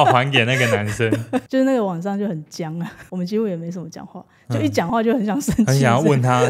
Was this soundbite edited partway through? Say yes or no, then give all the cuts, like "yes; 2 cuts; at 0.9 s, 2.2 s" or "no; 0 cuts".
yes; 2 cuts; at 1.5 s, 3.0 s